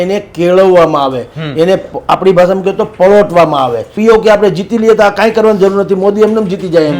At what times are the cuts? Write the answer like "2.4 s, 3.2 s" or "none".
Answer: 3.9 s